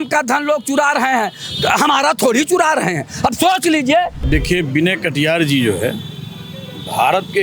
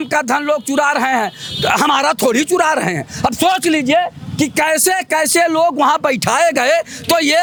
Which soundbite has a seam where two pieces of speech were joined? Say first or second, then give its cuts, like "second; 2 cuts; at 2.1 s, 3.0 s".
first; 1 cut; at 4.2 s